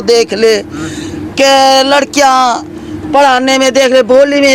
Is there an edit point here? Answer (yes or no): no